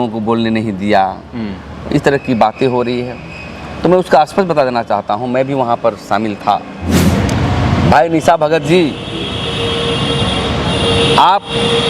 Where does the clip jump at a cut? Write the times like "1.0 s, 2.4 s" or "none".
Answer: 7.0 s

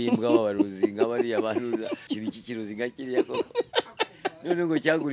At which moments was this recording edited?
2.1 s

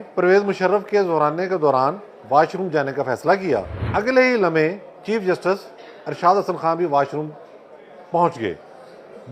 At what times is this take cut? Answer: 3.8 s

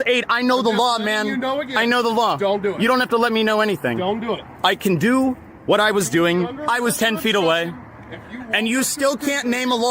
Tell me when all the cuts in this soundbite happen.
4.0 s

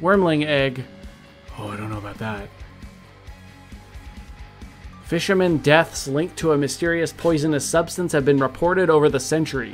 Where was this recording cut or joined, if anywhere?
none

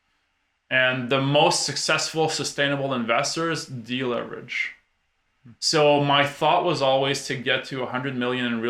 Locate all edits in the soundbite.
none

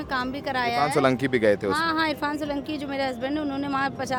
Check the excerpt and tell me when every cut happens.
none

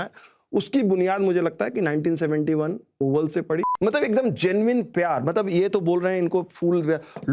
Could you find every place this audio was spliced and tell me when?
3.7 s

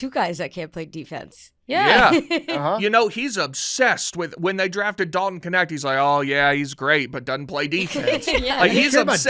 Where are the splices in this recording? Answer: 2.8 s

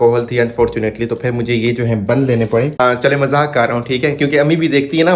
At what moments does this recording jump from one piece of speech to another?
2.7 s

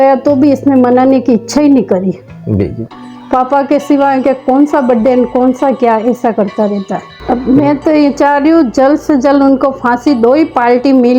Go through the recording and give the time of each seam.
7.1 s

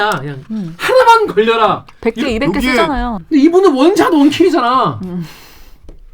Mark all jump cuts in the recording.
3.2 s

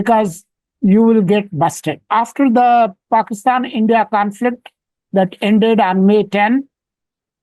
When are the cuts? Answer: 2.0 s

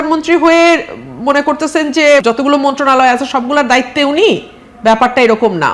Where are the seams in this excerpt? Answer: 2.2 s

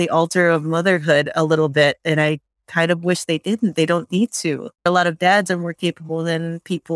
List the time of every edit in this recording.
4.9 s

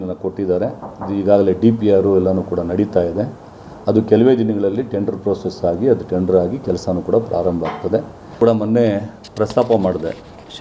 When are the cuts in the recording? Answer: 8.4 s

